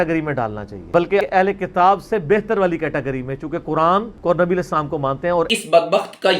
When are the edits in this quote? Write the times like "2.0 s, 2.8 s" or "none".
1.0 s, 5.5 s

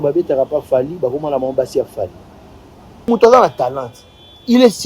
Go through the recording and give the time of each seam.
3.1 s

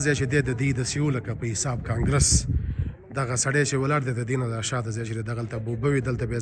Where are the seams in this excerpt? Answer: none

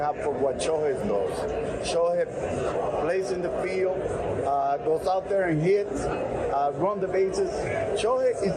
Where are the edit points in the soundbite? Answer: none

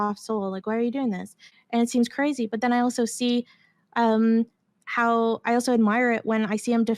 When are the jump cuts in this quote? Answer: 1.6 s

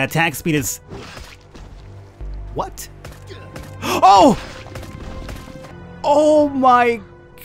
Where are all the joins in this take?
5.7 s

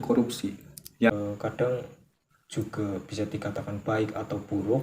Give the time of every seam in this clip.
1.1 s

